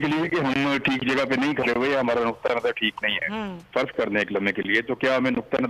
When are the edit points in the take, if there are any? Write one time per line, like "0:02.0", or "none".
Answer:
none